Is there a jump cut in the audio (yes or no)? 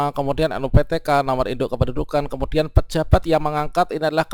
no